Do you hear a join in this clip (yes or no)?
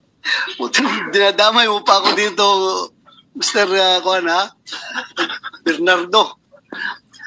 no